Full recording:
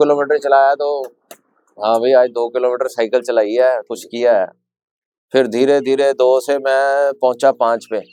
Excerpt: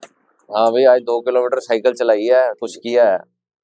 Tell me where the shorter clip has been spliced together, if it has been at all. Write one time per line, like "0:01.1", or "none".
none